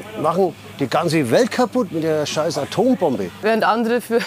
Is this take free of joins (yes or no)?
no